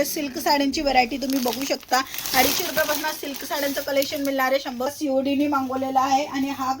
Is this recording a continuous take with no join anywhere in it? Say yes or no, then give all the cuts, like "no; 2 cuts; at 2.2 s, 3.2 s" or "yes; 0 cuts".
no; 1 cut; at 4.9 s